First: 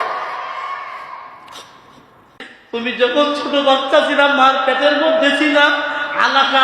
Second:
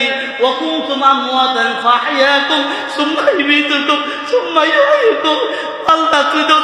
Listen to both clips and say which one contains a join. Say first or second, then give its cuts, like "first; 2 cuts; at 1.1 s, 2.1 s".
first; 1 cut; at 2.6 s